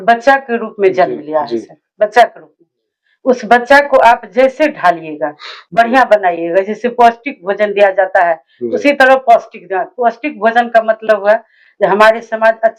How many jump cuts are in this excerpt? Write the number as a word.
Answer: zero